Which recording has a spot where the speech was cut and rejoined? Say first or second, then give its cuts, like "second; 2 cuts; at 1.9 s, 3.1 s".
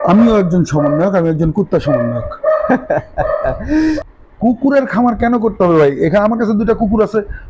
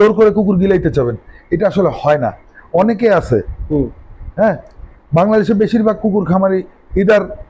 first; 1 cut; at 4.0 s